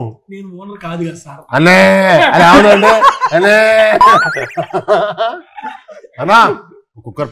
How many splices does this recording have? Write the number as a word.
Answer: zero